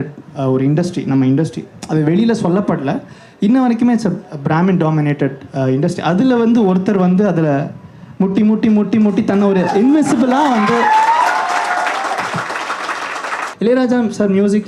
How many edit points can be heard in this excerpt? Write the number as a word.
one